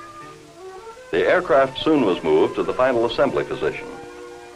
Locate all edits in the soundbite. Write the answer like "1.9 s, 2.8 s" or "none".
3.1 s

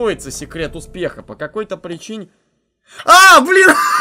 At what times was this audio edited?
none

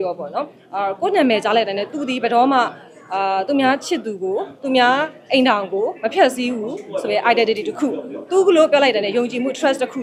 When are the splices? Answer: none

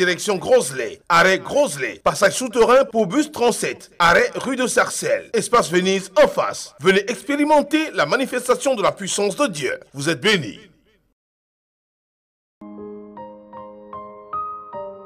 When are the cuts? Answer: 13.4 s

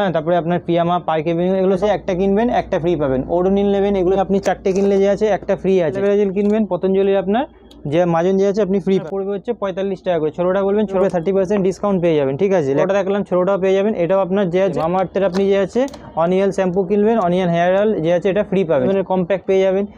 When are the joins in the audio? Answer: 1.8 s, 4.2 s, 6.0 s, 9.0 s, 11.0 s, 12.8 s, 14.8 s, 18.9 s

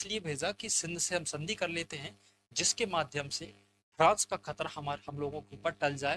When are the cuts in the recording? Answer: none

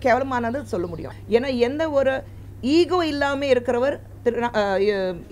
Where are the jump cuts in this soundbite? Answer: 1.0 s

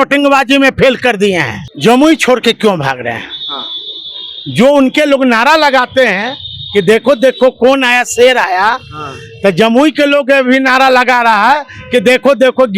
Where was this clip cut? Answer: 1.6 s

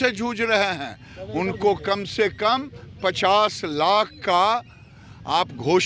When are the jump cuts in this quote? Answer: none

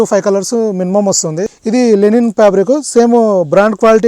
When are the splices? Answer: 1.4 s

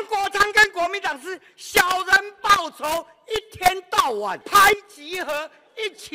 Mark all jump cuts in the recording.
4.4 s

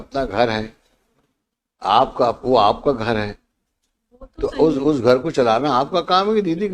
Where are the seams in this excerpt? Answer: none

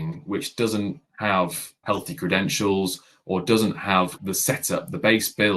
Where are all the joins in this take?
1.1 s, 1.8 s, 4.2 s

